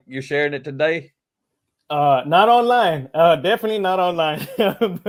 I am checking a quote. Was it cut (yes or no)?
no